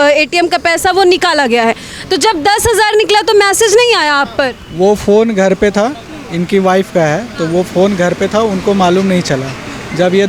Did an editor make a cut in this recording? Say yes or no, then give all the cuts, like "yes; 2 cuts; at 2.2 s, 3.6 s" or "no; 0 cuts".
no; 0 cuts